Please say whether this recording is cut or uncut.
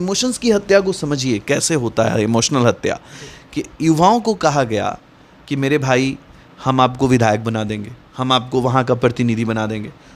uncut